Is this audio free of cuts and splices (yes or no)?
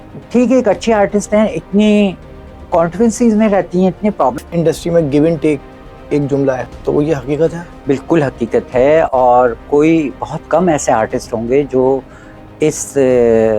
no